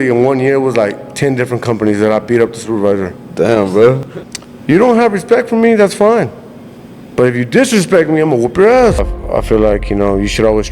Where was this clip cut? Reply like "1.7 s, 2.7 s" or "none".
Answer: 4.0 s, 9.2 s